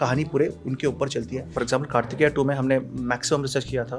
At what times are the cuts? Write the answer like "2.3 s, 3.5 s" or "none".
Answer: 1.5 s

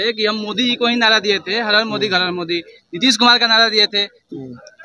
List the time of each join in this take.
none

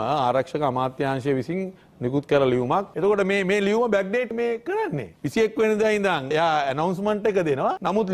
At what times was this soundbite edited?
2.9 s

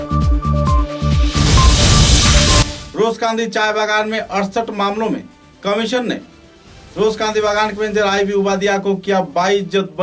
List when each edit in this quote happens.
2.8 s

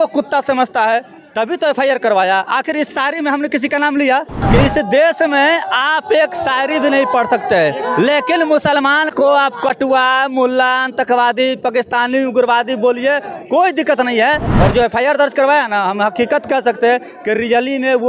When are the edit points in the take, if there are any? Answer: 4.4 s, 14.5 s

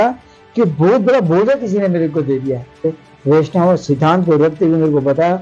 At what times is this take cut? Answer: 2.9 s

